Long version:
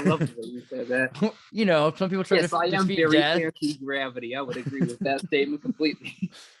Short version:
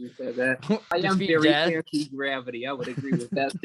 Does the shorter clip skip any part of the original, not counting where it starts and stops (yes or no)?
yes